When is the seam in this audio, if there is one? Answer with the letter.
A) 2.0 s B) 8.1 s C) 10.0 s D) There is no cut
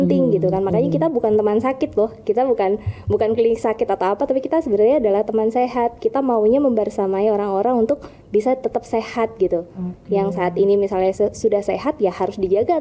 D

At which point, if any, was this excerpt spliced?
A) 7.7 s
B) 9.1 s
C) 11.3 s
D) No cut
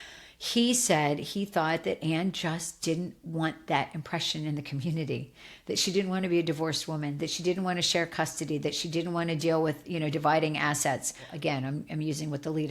C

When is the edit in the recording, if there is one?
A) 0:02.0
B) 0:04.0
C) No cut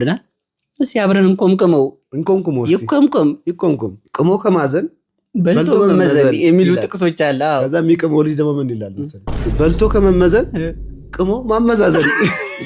B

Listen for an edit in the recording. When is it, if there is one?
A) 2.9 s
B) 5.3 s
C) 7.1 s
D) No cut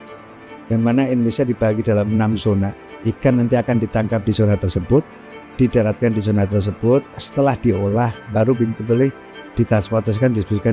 A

